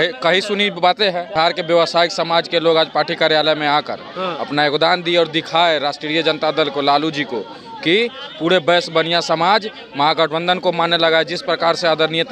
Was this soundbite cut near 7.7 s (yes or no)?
no